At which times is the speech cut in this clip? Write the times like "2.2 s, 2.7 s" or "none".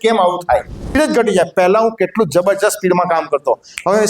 1.0 s